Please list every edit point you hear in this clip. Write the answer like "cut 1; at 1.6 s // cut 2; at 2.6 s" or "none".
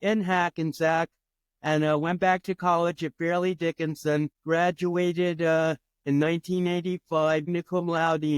cut 1; at 4.4 s // cut 2; at 7.5 s